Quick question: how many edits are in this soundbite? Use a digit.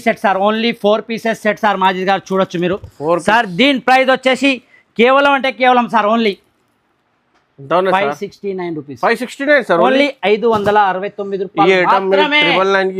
0